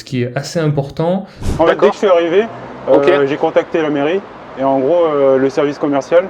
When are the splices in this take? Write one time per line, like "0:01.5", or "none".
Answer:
0:01.4